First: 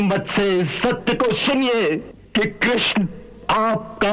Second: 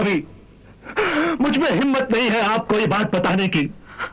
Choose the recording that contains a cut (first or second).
first